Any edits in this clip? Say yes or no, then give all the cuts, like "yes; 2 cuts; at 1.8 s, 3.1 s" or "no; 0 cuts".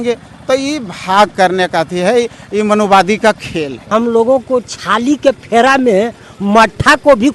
yes; 1 cut; at 3.9 s